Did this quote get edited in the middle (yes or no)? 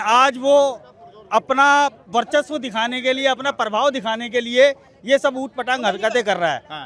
no